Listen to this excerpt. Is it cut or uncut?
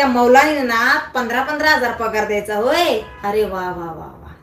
uncut